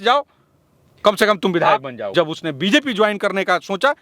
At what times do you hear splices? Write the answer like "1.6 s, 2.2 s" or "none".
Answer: 2.1 s